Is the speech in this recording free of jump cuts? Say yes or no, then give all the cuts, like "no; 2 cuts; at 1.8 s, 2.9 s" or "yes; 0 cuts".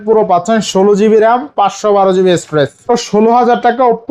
no; 1 cut; at 2.8 s